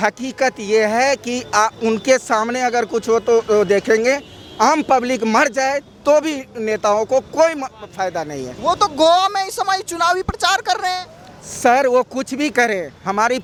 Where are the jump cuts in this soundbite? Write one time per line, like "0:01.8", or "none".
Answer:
none